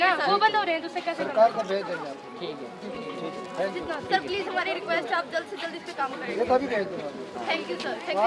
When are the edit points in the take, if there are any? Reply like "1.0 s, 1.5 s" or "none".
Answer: none